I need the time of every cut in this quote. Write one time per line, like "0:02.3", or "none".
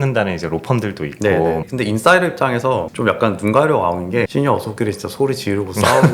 0:01.7
0:04.3